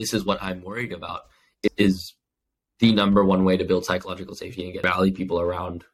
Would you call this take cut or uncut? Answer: cut